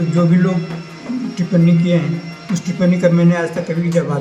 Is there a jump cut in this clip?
no; 0 cuts

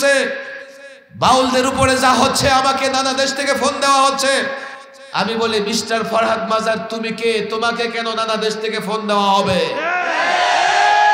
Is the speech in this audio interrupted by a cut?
no; 0 cuts

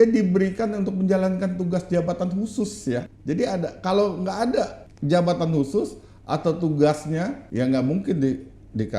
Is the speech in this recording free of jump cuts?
no; 3 cuts; at 3.1 s, 4.9 s, 7.4 s

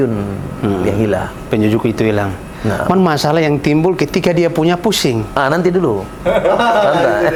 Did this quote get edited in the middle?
no; 0 cuts

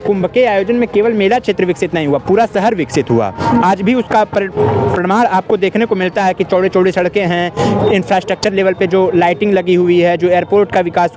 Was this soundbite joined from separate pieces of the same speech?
no; 0 cuts

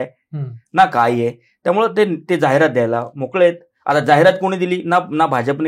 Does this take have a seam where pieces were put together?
no; 0 cuts

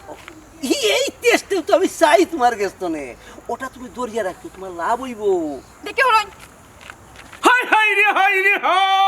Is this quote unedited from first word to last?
no; 1 cut; at 7.3 s

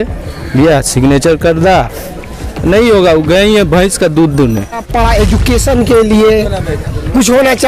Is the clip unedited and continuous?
no; 1 cut; at 4.8 s

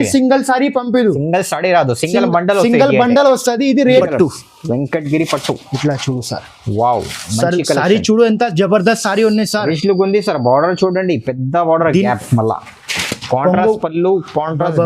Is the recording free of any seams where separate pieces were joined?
no; 1 cut; at 4.0 s

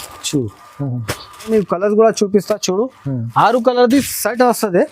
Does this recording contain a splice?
yes; 1 cut; at 1.5 s

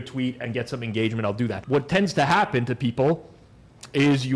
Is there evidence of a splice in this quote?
yes; 1 cut; at 1.6 s

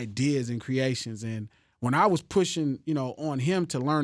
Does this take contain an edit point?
no; 0 cuts

